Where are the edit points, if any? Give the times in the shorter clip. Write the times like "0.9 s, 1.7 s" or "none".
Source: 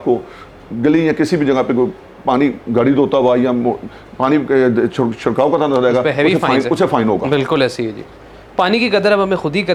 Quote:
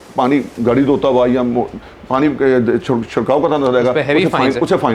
none